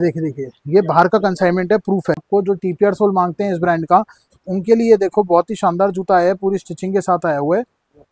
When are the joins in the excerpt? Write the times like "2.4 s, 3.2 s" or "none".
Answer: 2.2 s